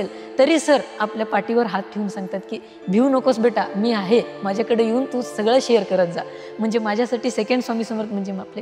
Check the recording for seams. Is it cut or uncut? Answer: uncut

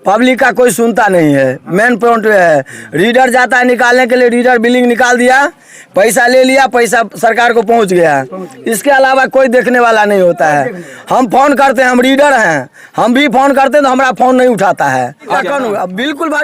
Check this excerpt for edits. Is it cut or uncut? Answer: cut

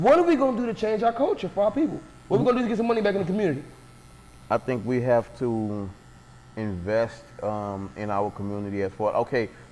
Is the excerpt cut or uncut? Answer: uncut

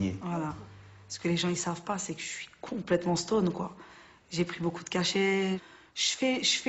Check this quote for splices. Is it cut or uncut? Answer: cut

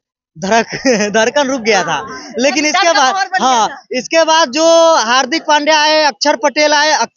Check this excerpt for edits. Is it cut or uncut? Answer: uncut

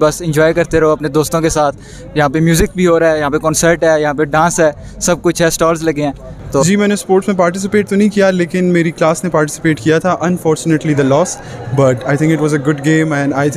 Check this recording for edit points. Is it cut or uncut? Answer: cut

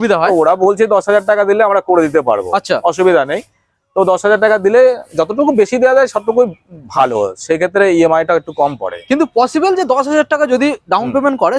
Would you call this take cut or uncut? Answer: uncut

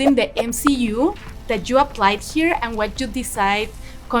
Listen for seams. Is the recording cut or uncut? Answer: uncut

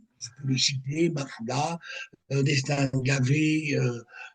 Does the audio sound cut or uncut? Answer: uncut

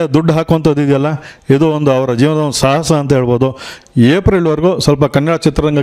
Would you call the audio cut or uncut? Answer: cut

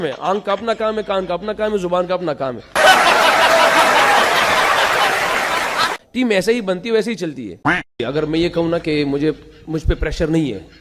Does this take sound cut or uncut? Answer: cut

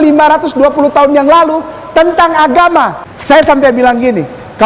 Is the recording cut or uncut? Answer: cut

